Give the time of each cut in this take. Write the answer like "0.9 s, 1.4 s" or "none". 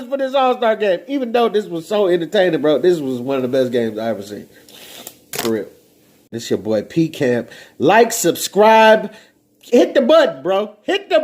6.4 s